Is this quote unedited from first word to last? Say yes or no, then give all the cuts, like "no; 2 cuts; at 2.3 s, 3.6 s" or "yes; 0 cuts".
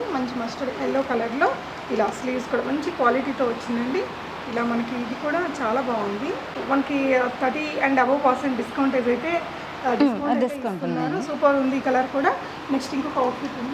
yes; 0 cuts